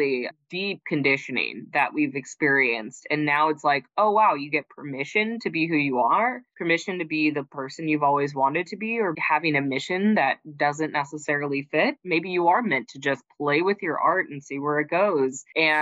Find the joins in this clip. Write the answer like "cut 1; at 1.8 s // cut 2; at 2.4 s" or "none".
cut 1; at 9.2 s